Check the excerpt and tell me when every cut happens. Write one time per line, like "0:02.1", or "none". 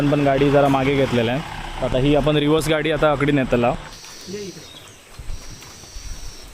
0:03.9